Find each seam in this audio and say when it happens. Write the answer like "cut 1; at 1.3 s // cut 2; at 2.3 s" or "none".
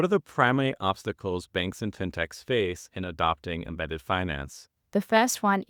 cut 1; at 4.7 s